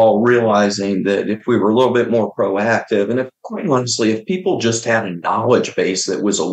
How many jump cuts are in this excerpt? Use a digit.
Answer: 0